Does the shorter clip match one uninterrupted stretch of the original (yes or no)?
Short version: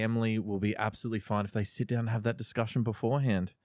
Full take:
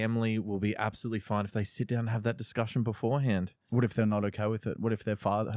yes